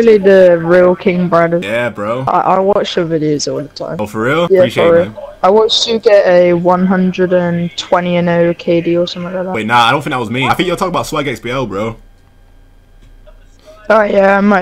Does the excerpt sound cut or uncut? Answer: uncut